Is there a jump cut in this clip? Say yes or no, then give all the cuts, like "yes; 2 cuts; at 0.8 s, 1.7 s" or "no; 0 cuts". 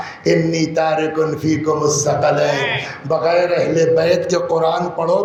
no; 0 cuts